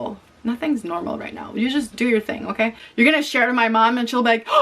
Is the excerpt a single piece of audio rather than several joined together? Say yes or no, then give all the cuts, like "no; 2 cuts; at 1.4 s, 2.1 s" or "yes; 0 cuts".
no; 1 cut; at 2.8 s